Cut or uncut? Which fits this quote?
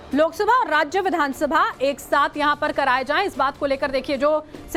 uncut